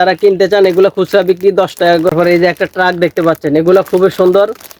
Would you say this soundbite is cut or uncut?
cut